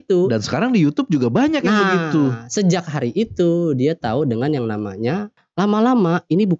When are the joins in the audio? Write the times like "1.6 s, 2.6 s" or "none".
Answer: 5.4 s

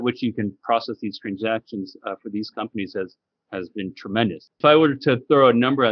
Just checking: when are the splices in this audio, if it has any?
none

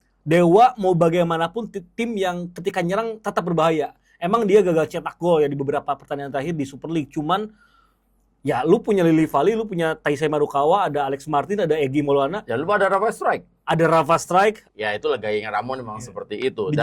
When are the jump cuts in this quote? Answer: 14.7 s

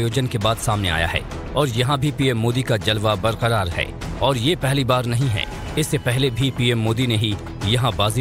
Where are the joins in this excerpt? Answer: none

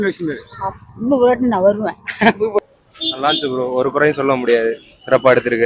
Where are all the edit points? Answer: 2.6 s

